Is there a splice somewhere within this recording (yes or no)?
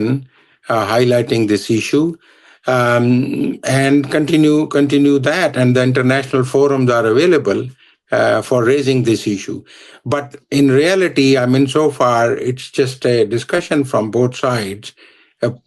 no